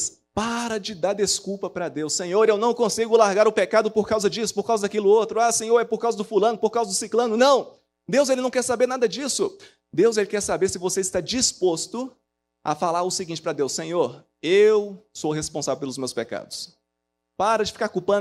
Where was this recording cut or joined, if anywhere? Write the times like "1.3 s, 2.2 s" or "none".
none